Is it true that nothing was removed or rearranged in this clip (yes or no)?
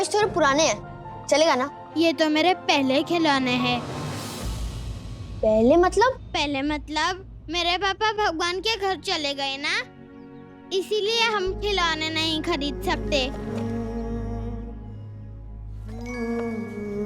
no